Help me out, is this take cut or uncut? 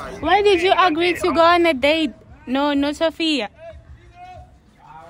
uncut